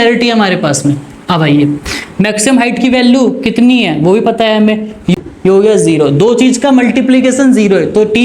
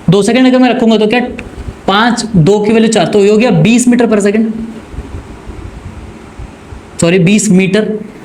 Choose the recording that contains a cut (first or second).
first